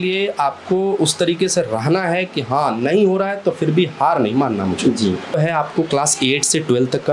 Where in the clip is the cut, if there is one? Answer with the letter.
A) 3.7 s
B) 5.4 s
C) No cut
B